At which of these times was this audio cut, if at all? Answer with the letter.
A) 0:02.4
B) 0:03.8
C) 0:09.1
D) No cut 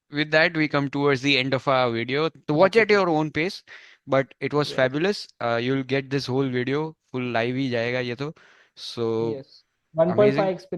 A